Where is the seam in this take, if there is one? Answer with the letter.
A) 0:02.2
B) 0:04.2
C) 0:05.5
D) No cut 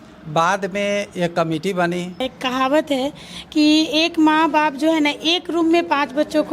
A